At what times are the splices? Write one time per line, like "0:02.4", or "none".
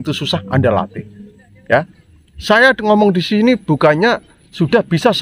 none